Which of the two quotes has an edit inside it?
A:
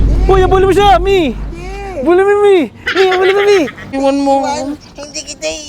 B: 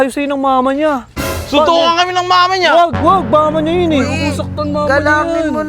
A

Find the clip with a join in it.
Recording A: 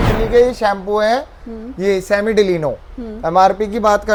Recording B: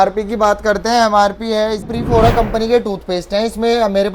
B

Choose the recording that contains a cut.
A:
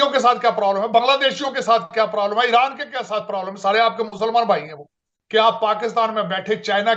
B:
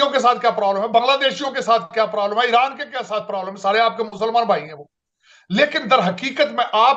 A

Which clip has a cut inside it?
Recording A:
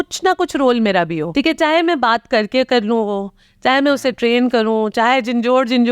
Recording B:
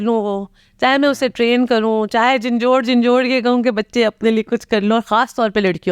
A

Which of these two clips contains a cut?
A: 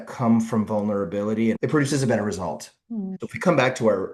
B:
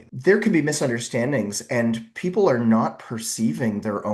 A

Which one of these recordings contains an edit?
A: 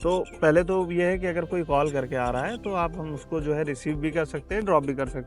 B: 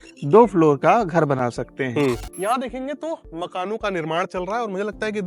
B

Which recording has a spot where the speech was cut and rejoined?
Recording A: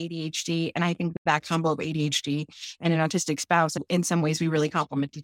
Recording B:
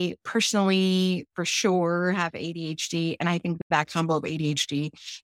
A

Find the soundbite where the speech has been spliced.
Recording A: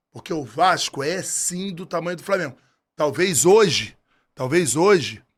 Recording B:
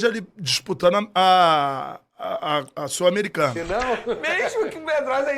B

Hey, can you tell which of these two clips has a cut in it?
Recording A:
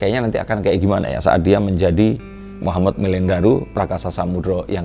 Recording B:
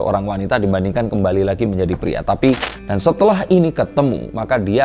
B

